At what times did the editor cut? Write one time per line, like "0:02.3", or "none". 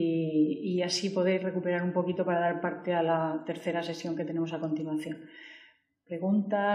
0:02.1